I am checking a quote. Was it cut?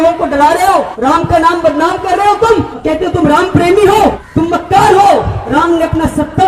yes; 4 cuts; at 0.9 s, 2.7 s, 4.2 s, 5.4 s

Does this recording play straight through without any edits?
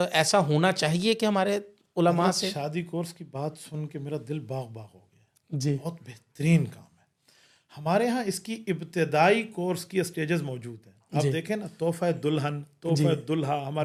yes; 0 cuts

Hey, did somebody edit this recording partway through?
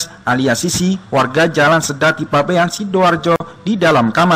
yes; 1 cut; at 3.4 s

